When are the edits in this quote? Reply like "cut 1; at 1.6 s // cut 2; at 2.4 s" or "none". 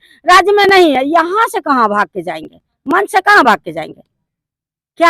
none